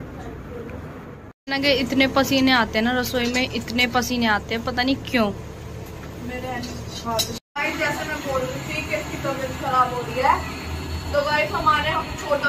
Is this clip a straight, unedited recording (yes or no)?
no